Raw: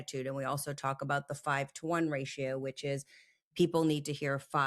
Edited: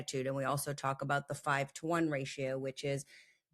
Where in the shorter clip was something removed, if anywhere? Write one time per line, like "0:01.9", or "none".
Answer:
none